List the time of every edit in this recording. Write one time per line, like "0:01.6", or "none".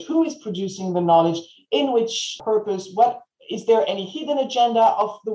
0:02.4